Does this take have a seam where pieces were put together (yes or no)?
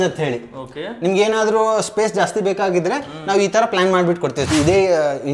yes